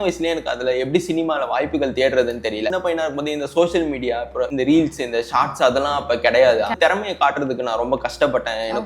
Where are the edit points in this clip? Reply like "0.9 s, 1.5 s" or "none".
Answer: 2.7 s, 4.5 s, 6.8 s